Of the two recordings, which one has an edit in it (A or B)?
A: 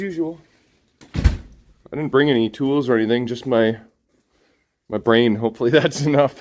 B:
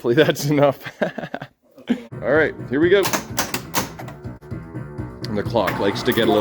B